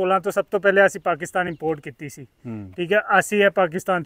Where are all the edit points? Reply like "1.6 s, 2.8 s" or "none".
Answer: none